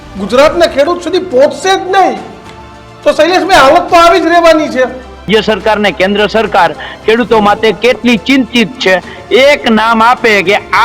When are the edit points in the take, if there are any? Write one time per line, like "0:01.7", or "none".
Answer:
0:05.3